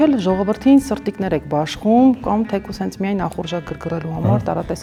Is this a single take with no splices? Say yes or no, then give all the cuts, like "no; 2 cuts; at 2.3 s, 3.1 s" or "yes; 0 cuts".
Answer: yes; 0 cuts